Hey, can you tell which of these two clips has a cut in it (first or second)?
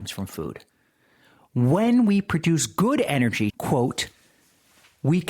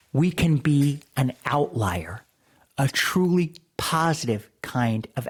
first